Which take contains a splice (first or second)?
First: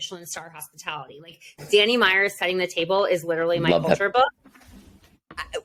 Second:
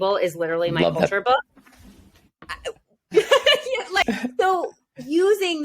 second